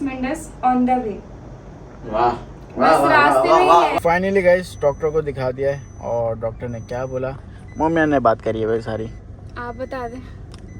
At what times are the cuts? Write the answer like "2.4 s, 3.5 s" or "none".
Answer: 3.9 s